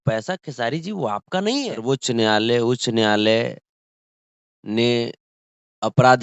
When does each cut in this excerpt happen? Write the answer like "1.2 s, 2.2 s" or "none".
1.8 s